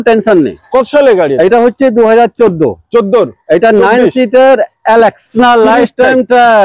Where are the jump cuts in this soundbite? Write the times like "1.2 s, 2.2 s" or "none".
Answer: 5.3 s